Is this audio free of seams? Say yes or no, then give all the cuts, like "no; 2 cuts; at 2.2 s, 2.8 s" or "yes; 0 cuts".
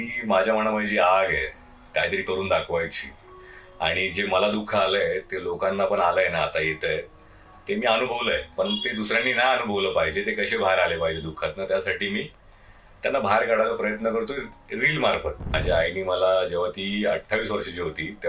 no; 1 cut; at 15.5 s